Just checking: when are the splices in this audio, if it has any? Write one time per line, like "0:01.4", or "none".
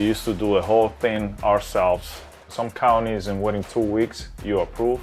0:02.5